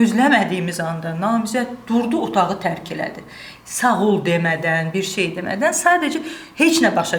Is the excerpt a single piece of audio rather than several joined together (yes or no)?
yes